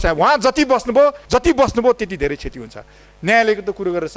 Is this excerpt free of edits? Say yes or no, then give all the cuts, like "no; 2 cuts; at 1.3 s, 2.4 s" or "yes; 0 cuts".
no; 1 cut; at 1.2 s